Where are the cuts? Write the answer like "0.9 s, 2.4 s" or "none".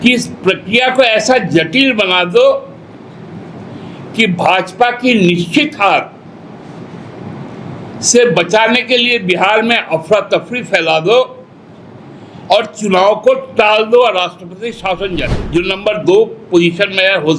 15.2 s